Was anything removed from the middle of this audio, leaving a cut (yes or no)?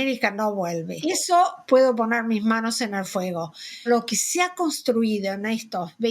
yes